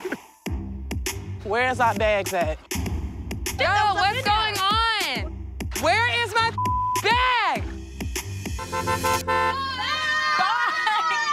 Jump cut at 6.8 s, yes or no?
no